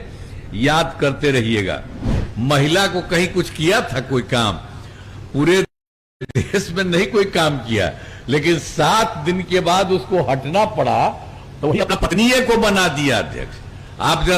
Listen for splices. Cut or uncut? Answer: cut